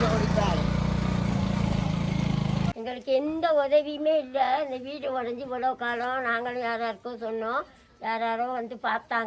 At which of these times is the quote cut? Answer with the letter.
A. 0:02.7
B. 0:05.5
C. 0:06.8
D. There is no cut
A